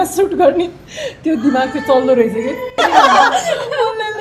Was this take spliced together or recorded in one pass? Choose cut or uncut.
cut